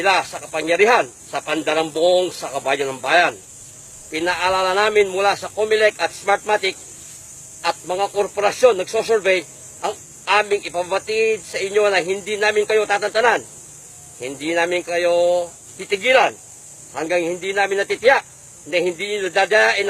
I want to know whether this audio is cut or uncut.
cut